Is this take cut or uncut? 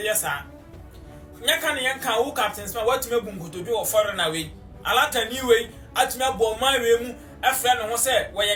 uncut